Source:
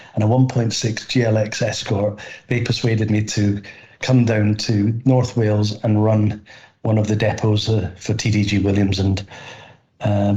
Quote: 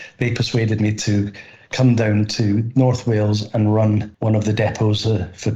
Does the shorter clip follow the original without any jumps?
no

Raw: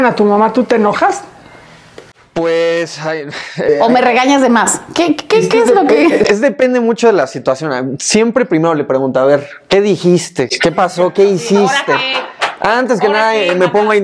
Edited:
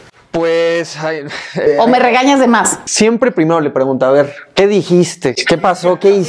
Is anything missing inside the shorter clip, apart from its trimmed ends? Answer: yes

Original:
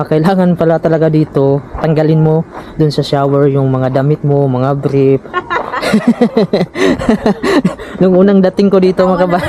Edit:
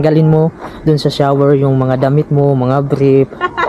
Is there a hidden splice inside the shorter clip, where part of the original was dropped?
no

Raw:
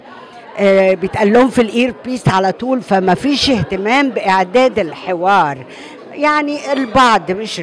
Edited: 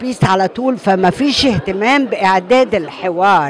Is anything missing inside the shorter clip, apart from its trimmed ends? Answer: no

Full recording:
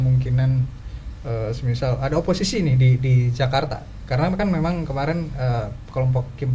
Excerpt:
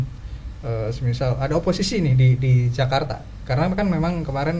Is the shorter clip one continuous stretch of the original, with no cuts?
yes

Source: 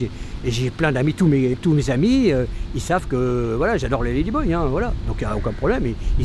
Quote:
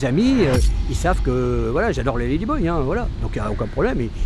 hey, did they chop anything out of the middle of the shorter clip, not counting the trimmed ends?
no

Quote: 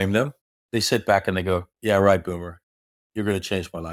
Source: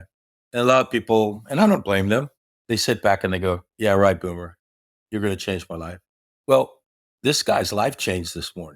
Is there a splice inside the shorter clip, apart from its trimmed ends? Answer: no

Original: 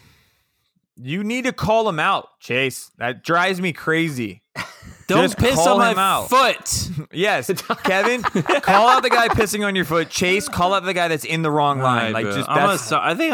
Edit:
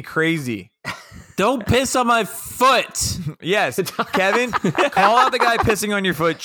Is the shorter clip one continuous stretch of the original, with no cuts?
yes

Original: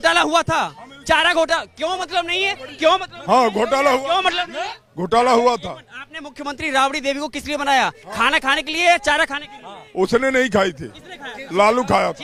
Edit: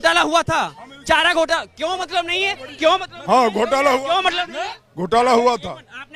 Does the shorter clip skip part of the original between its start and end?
no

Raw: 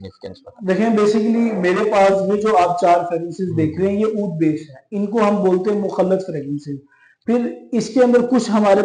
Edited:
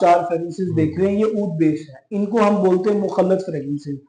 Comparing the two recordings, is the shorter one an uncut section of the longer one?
yes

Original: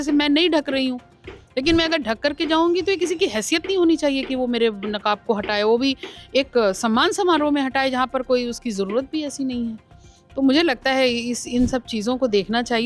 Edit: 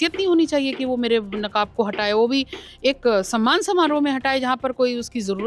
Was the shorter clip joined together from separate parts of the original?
no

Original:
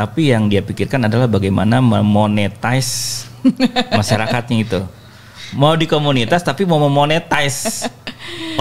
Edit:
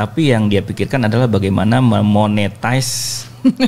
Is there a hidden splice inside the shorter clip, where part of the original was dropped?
no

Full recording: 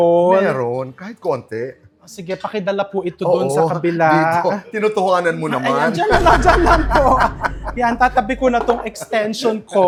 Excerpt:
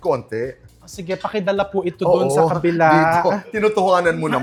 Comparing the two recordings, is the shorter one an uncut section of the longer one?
yes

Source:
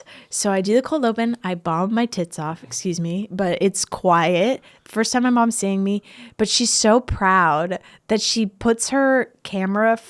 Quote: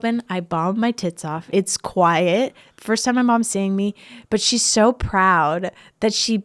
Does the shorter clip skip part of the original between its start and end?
yes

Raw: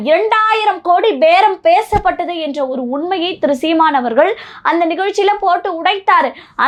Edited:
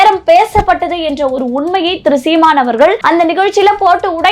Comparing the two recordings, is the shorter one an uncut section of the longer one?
no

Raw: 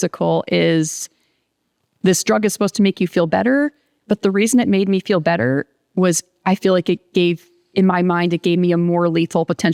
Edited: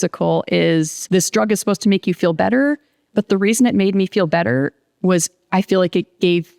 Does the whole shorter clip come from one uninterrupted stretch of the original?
no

